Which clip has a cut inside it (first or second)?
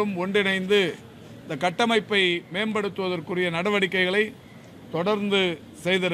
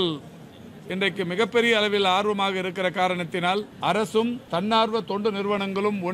second